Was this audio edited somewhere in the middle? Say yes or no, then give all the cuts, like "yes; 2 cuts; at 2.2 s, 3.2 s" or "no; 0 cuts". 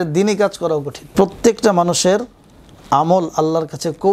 yes; 1 cut; at 1.1 s